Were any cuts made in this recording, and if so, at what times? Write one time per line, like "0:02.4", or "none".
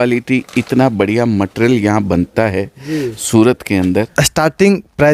0:04.1